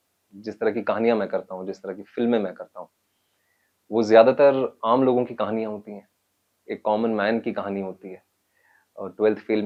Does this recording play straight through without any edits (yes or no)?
yes